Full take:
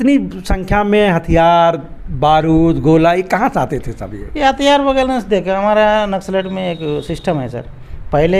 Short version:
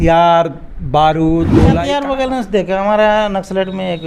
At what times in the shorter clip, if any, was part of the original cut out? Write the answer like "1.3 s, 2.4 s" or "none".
1.8 s